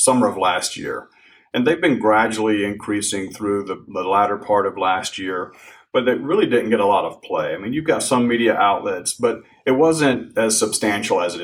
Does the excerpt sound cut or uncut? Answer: uncut